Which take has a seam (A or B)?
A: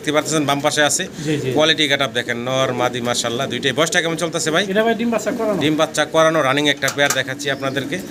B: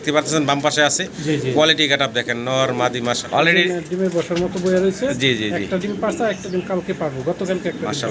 B